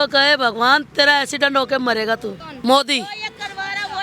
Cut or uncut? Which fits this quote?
uncut